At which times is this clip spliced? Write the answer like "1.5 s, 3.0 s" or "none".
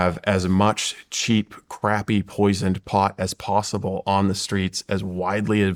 none